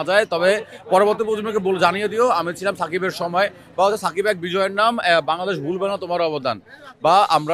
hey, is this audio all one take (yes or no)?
yes